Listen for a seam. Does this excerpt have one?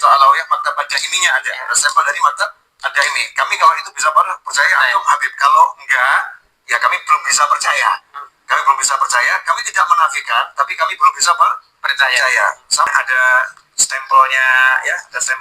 yes; 1 cut; at 12.9 s

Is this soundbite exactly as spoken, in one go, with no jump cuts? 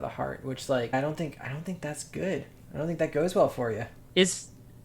no; 2 cuts; at 0.9 s, 3.9 s

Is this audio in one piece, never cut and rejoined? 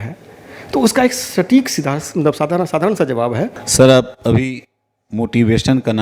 no; 1 cut; at 3.6 s

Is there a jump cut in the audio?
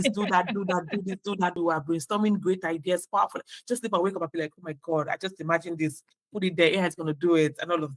yes; 1 cut; at 1.6 s

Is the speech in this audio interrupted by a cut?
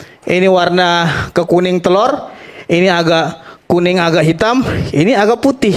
no; 0 cuts

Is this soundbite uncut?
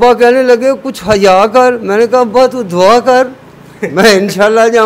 yes; 0 cuts

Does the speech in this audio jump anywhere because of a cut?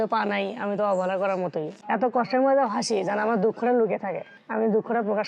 yes; 1 cut; at 1.8 s

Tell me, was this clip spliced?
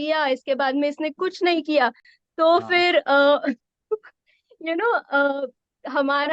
no; 0 cuts

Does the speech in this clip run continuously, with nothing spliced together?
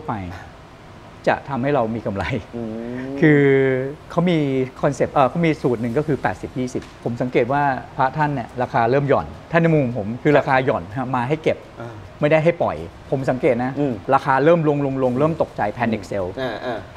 no; 5 cuts; at 4.0 s, 7.0 s, 9.4 s, 12.9 s, 14.0 s

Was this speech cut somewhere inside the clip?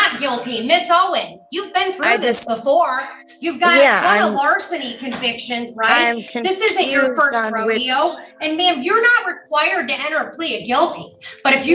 no; 0 cuts

